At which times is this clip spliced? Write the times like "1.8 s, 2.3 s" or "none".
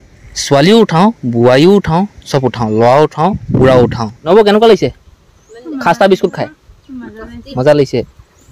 4.1 s

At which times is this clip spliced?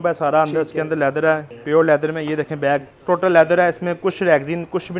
1.5 s, 2.9 s

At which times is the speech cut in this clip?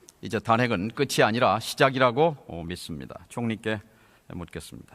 3.2 s

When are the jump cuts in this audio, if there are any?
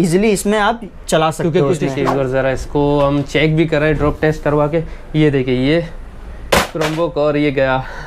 1.9 s

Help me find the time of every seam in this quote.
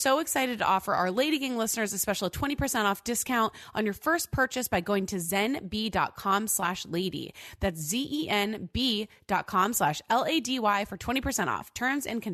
none

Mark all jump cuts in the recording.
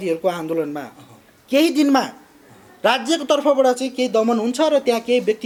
none

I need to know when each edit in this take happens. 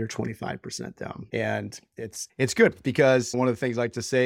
1.2 s, 2.2 s, 3.3 s

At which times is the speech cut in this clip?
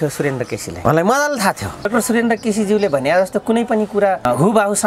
1.9 s

